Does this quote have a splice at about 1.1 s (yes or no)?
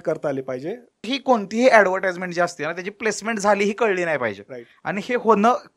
yes